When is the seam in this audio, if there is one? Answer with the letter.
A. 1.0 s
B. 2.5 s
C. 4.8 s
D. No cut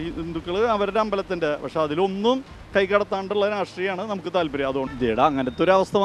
D